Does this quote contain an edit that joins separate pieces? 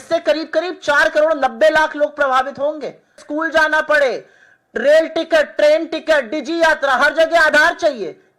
yes; 1 cut; at 3.2 s

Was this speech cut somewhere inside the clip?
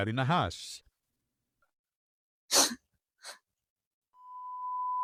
no; 0 cuts

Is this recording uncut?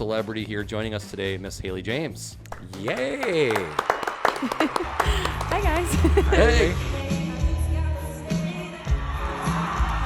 no; 1 cut; at 6.8 s

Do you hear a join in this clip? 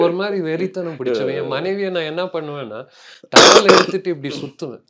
no; 0 cuts

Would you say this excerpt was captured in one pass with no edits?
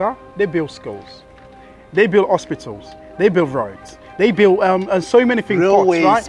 yes; 0 cuts

